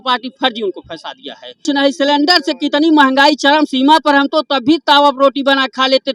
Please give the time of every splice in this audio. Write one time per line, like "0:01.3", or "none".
0:01.6